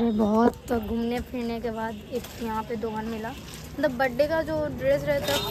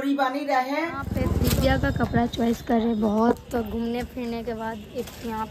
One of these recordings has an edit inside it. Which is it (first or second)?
second